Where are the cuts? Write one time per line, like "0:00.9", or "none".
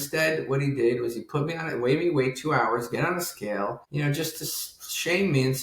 0:03.8